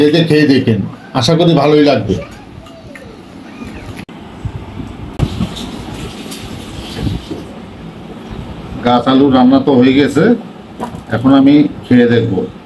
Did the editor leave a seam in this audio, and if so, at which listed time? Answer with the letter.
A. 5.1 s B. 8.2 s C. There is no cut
A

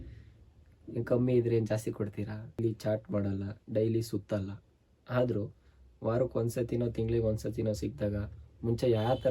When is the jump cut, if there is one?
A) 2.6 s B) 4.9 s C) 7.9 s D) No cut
A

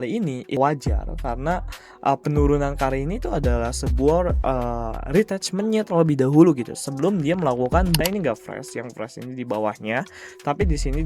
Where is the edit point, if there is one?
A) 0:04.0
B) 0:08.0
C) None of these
B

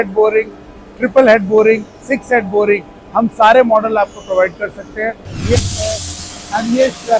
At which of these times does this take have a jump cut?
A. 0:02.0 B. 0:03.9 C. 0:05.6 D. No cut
C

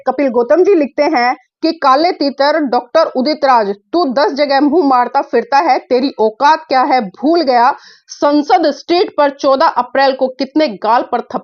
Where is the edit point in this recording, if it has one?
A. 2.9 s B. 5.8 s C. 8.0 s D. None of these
D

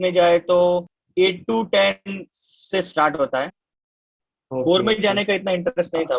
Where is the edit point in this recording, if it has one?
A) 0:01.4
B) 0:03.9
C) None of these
B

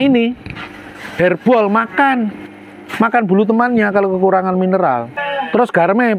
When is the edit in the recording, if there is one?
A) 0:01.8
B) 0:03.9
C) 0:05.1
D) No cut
C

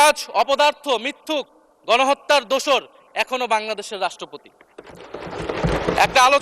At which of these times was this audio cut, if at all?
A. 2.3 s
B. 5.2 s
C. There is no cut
C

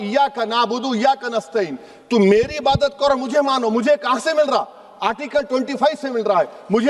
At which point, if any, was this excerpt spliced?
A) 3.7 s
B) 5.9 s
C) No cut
C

